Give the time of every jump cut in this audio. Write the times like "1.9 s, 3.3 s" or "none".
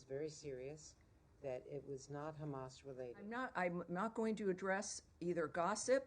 3.3 s

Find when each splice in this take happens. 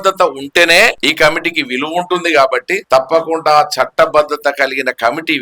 1.0 s, 2.8 s

